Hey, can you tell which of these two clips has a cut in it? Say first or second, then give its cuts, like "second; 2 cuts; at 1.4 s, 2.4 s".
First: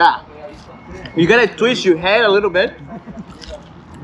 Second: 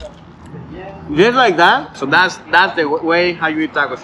second; 1 cut; at 2.0 s